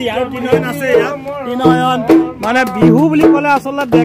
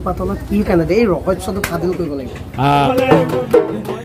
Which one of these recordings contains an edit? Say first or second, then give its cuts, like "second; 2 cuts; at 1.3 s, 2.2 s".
second; 1 cut; at 2.9 s